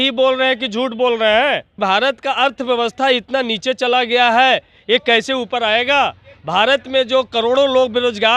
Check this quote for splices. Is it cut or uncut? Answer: cut